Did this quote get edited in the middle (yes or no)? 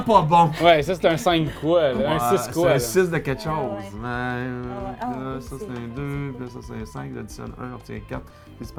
no